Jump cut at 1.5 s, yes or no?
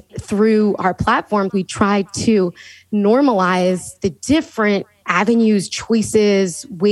yes